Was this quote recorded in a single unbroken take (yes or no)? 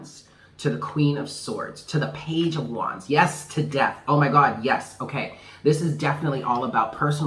yes